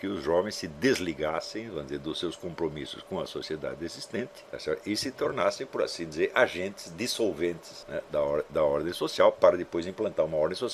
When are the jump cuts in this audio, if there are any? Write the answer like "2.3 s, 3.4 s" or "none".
4.4 s, 7.7 s